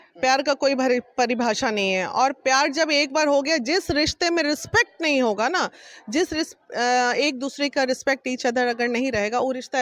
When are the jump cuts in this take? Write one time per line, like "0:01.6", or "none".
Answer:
none

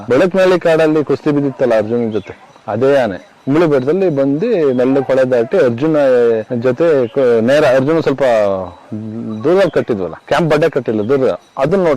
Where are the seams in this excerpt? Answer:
none

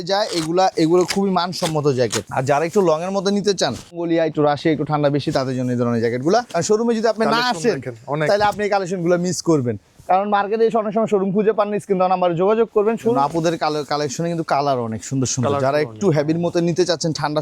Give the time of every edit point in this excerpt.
0:02.2
0:06.6
0:13.1

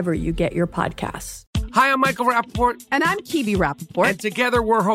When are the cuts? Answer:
0:01.3

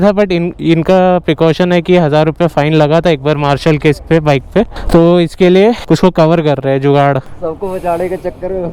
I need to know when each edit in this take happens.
none

